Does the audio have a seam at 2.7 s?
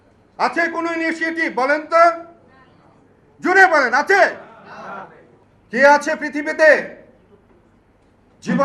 no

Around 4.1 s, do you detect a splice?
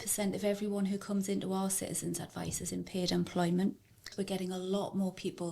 yes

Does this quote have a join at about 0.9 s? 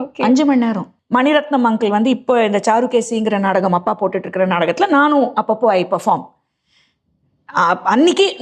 yes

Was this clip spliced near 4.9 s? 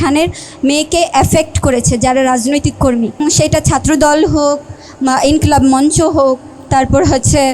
no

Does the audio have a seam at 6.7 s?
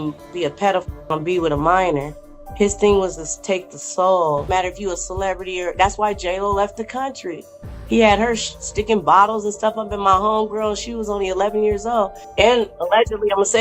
no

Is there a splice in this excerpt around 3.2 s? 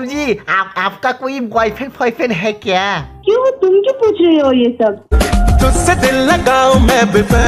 no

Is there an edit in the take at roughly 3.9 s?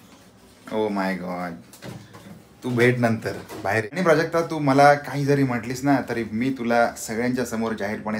yes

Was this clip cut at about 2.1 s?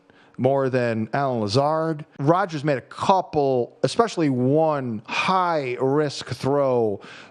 yes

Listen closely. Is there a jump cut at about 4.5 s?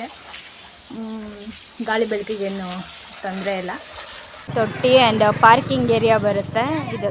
yes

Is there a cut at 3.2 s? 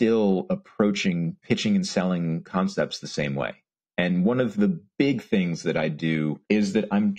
no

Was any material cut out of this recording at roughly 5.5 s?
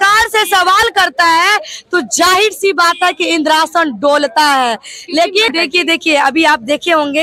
yes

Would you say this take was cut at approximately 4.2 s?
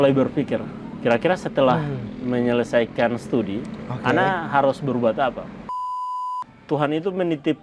no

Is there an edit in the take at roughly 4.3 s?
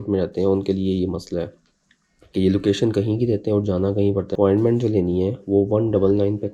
yes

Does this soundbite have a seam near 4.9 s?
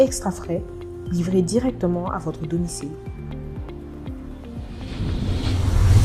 yes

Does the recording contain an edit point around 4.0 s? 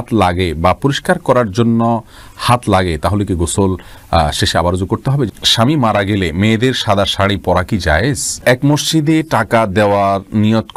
no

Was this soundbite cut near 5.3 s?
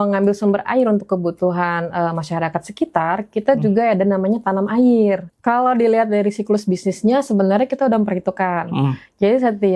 yes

